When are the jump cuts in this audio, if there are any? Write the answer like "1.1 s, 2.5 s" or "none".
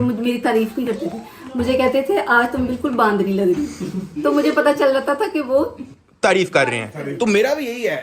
none